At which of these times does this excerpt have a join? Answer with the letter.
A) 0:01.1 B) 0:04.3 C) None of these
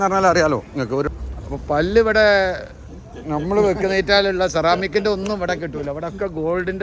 A